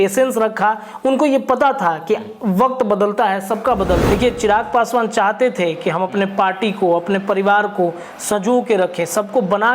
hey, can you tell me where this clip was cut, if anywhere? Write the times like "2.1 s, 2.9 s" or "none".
4.0 s